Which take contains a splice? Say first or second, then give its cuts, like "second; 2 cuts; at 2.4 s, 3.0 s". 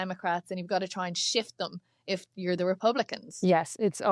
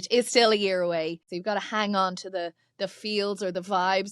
second; 1 cut; at 1.3 s